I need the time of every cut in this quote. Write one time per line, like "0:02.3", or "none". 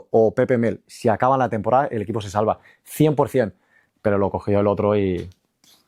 none

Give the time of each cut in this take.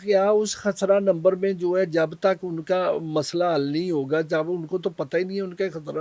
none

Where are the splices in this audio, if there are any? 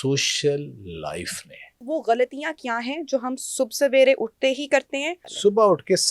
0:01.8
0:05.2

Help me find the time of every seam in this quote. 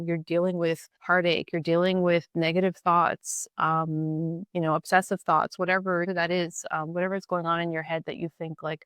0:00.9
0:06.1

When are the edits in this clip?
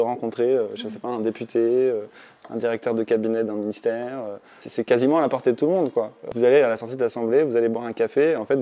0:04.6
0:06.3

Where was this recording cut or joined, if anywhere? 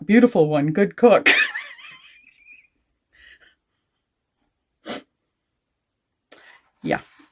none

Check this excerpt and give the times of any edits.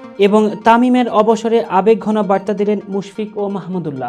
none

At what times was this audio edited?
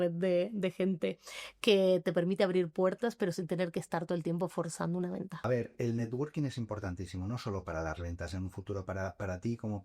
0:05.4

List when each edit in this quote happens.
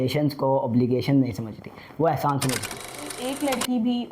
0:03.1

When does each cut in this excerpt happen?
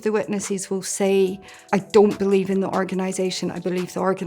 0:01.5

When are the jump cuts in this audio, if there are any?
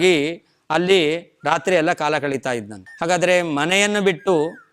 0:02.9

